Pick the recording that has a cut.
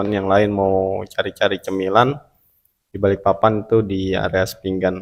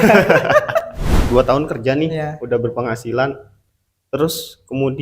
second; 1 cut; at 1.1 s

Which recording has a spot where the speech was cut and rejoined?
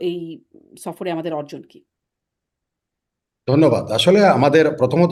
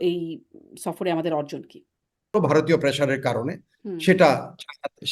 second; 1 cut; at 2.4 s

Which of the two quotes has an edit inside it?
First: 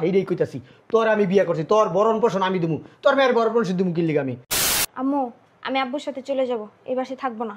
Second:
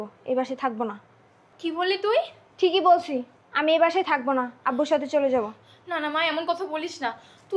first; 1 cut; at 4.4 s

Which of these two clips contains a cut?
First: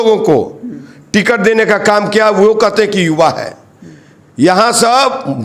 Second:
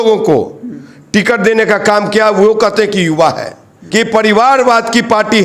second; 1 cut; at 3.8 s

